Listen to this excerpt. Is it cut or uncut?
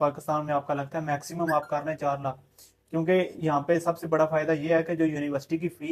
uncut